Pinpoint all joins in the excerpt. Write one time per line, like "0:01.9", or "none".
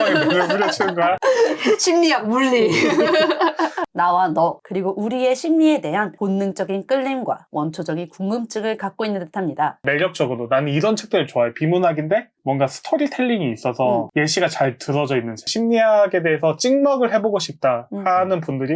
0:03.8
0:09.8
0:15.5